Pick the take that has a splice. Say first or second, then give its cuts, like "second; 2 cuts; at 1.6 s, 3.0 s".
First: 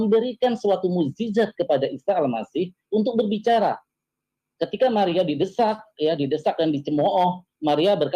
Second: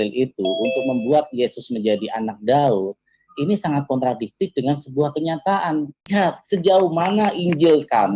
second; 1 cut; at 6.1 s